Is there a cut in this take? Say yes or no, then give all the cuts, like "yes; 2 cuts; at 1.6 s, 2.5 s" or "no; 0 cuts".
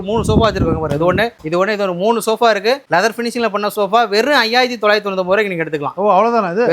no; 0 cuts